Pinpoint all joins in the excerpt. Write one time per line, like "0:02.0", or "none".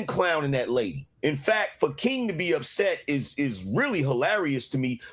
0:01.0